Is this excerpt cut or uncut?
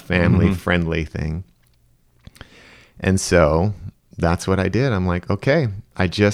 uncut